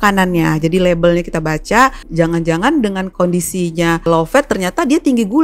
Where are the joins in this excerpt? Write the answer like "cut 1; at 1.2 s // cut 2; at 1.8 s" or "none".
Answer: cut 1; at 2.0 s // cut 2; at 3.1 s // cut 3; at 4.1 s